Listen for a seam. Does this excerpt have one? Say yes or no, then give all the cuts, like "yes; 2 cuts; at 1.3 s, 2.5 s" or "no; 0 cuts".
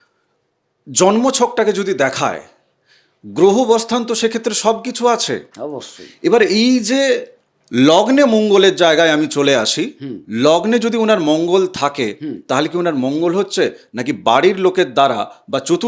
no; 0 cuts